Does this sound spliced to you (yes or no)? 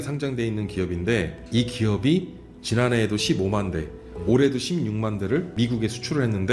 yes